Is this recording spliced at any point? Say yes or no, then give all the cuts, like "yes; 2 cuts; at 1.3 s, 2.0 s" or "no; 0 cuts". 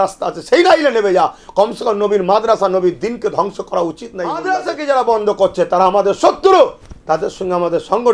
yes; 1 cut; at 4.4 s